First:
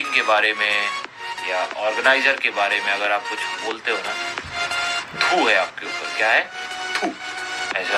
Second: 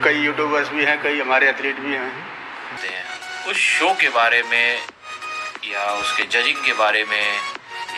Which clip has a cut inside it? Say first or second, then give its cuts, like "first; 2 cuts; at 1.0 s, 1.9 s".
second; 1 cut; at 2.8 s